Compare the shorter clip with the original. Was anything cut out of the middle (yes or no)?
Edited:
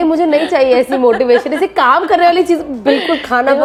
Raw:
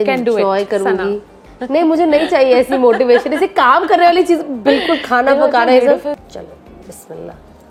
no